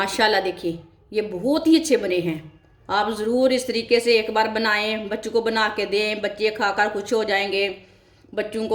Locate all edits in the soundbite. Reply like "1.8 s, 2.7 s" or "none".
none